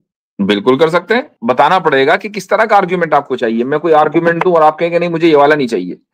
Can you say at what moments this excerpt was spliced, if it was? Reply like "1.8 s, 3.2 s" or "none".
1.3 s